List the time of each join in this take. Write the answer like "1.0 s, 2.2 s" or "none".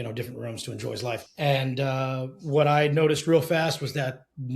1.3 s